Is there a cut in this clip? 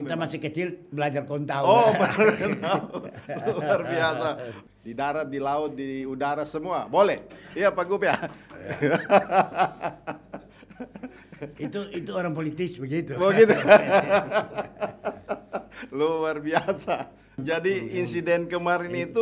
yes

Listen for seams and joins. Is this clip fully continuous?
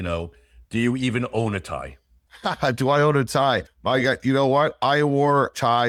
yes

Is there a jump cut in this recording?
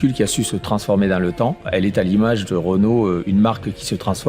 yes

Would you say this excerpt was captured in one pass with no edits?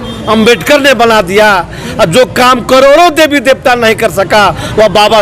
yes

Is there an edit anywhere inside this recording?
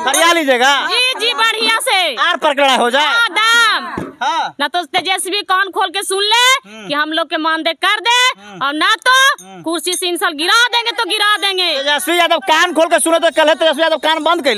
no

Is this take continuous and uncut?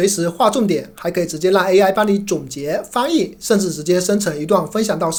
yes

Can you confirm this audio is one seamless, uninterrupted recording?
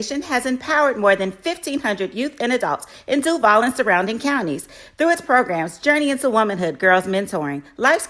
no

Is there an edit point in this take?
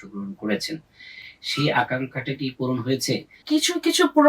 yes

